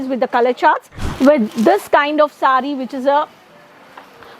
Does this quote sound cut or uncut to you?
cut